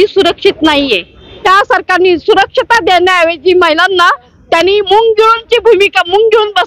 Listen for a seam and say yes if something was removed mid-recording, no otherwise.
yes